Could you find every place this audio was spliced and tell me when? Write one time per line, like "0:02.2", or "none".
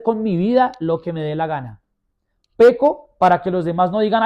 none